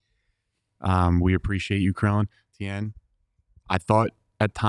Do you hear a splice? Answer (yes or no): no